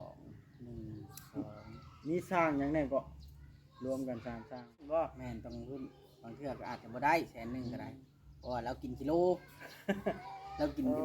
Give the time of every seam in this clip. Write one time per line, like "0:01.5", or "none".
0:04.8